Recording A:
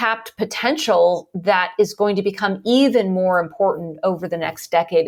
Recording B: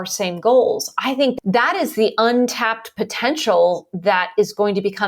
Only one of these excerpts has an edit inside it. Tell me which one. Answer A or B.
B